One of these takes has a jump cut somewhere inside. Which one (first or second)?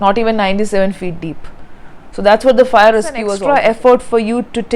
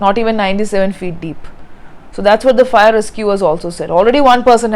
first